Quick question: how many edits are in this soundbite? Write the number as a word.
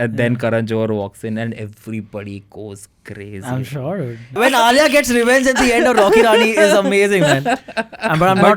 one